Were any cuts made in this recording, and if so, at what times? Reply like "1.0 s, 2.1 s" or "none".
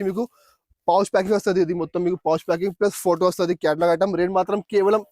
none